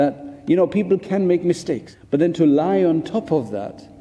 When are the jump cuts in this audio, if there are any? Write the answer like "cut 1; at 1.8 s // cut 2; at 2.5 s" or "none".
cut 1; at 1.9 s